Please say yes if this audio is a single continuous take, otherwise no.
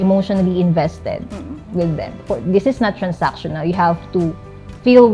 yes